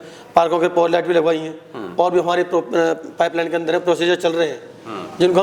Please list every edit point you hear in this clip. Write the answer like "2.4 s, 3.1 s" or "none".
none

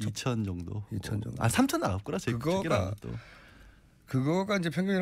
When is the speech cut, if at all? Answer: 1.1 s

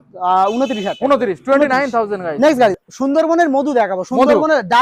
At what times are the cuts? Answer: 2.8 s

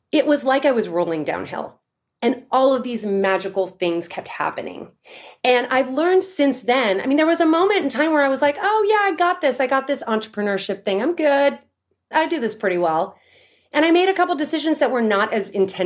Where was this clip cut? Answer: 12.1 s

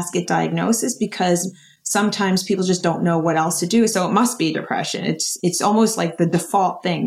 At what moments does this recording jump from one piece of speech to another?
3.9 s

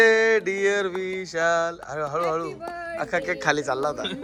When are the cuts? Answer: none

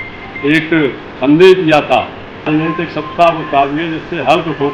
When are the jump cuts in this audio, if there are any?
2.5 s

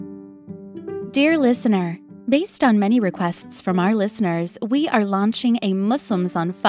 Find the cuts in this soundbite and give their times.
1.1 s

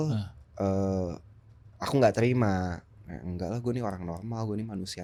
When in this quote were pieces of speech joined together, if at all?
none

